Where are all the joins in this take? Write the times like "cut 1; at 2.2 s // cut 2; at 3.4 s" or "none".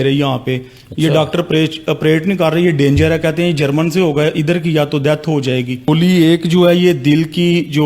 cut 1; at 5.8 s